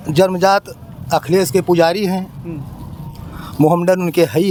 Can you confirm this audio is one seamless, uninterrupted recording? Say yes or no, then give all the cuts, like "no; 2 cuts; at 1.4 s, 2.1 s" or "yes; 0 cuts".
yes; 0 cuts